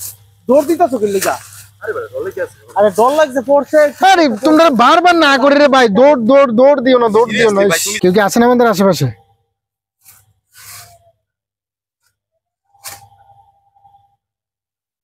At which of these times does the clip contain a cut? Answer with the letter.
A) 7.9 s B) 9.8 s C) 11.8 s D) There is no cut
A